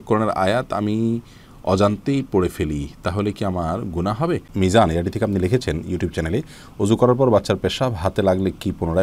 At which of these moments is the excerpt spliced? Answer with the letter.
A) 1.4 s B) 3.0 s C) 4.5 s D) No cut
C